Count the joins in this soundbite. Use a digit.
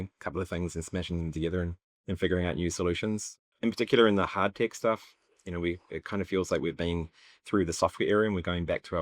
2